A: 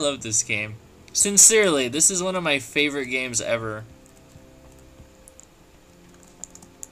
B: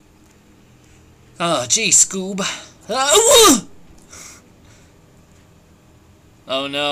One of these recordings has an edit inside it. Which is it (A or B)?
B